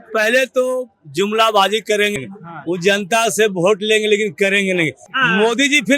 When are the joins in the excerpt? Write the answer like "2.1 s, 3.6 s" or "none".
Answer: 2.1 s, 5.1 s